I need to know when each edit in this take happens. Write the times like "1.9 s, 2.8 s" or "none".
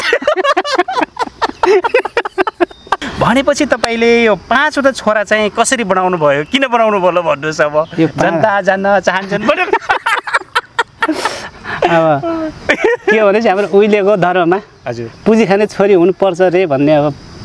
3.0 s